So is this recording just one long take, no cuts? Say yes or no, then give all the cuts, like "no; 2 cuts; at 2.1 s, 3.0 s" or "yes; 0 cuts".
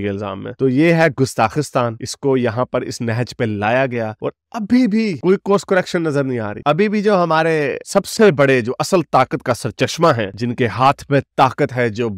yes; 0 cuts